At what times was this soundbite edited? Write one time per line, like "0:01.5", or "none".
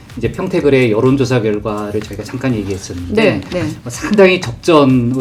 none